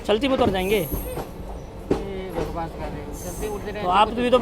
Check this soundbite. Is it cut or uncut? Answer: uncut